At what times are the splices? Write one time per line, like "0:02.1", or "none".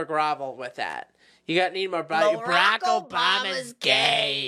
none